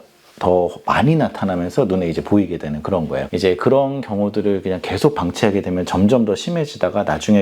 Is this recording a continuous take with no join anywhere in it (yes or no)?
no